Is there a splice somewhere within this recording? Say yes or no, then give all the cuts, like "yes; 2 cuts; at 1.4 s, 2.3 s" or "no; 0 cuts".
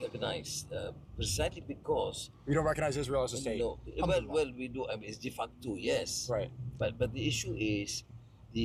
no; 0 cuts